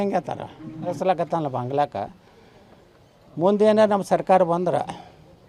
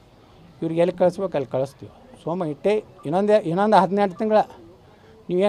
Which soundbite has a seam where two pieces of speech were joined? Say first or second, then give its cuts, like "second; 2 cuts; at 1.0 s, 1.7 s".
first; 1 cut; at 0.9 s